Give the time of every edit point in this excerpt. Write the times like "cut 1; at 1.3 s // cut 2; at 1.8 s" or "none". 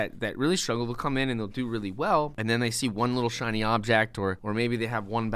cut 1; at 2.3 s // cut 2; at 4.4 s